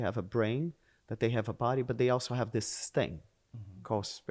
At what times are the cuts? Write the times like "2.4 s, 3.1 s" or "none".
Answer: none